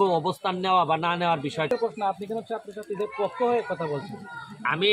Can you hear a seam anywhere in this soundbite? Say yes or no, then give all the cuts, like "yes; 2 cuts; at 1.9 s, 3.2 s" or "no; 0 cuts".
yes; 1 cut; at 1.7 s